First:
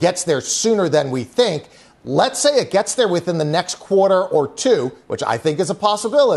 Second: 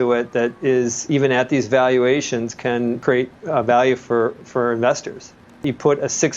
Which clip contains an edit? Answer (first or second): second